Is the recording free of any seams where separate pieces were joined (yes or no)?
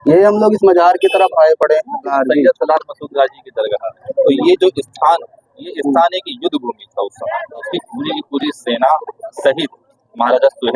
no